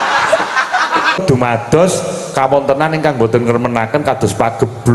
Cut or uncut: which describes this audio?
cut